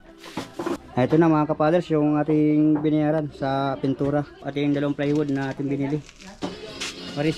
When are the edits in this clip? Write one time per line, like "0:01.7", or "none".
0:00.8
0:04.4
0:06.2